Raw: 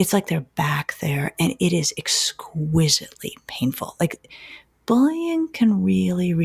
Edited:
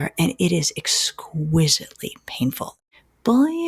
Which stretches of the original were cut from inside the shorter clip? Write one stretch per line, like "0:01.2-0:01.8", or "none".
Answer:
0:03.9-0:04.3